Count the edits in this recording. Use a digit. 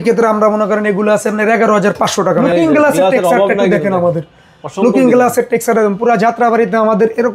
1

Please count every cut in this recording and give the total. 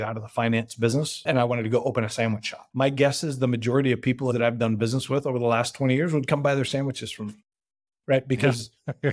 3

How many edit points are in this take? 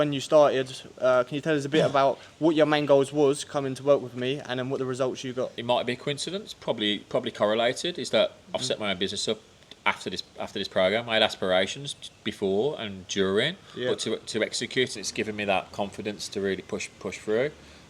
2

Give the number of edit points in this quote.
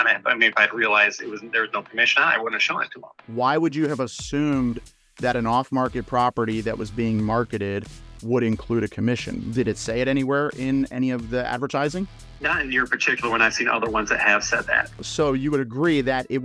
1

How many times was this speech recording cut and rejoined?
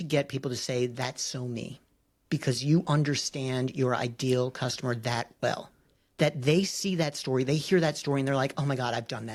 0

